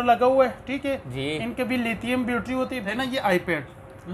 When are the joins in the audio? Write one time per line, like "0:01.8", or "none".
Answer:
0:02.8